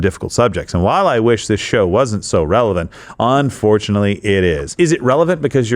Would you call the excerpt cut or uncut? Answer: cut